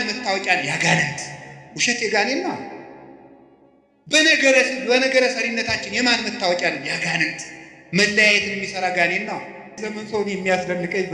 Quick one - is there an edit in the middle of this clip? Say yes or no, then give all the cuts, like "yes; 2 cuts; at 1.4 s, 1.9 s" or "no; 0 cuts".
yes; 1 cut; at 9.8 s